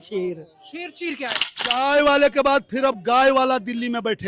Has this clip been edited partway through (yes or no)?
yes